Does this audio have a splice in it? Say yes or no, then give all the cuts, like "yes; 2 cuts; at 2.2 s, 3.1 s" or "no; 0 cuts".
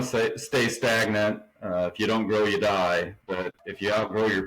yes; 2 cuts; at 1.5 s, 3.3 s